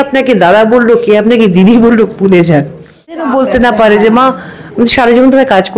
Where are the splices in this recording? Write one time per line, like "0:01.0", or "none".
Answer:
0:03.3

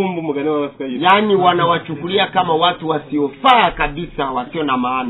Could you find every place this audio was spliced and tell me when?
none

